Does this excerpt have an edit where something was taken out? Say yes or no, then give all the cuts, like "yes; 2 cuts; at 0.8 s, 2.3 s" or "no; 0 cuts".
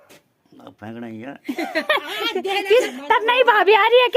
yes; 1 cut; at 2.9 s